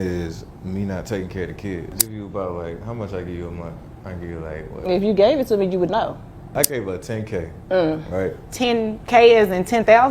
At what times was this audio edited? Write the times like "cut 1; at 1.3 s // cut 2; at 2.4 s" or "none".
cut 1; at 2.0 s // cut 2; at 6.5 s